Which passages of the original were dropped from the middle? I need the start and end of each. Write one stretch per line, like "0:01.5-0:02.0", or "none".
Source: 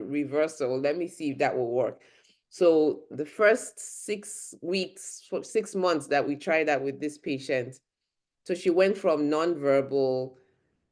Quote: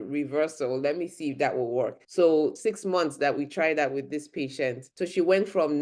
0:02.0-0:02.4
0:03.0-0:05.5
0:07.8-0:08.3